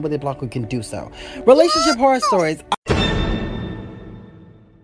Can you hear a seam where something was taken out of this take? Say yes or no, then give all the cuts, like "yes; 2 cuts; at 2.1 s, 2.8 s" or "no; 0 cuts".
yes; 1 cut; at 2.7 s